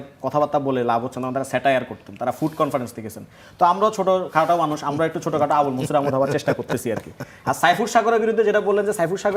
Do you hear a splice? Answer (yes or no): no